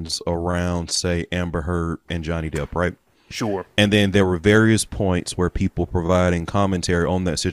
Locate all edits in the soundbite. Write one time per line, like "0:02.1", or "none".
none